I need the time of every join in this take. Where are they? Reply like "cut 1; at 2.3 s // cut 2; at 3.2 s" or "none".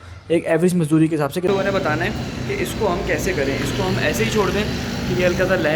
cut 1; at 1.5 s